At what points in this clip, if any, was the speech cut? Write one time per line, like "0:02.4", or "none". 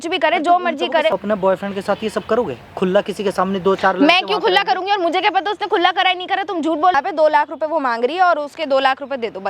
0:01.1
0:06.9